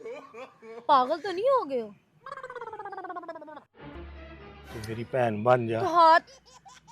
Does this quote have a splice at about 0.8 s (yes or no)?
yes